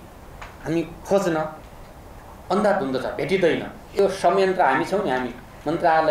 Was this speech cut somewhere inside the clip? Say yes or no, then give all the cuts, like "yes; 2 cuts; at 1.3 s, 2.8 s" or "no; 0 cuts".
yes; 1 cut; at 4.0 s